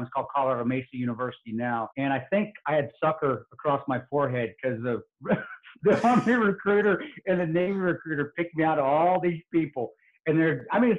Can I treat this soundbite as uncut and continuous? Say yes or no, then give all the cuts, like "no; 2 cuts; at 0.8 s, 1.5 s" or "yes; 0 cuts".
no; 1 cut; at 1.9 s